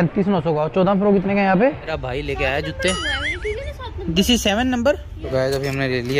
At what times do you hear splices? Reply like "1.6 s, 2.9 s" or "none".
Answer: 1.9 s, 5.1 s